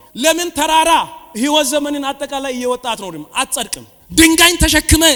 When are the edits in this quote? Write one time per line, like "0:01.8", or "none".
none